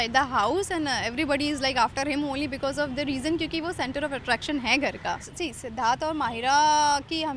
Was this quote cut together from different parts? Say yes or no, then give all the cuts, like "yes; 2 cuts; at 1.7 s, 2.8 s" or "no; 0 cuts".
yes; 1 cut; at 5.3 s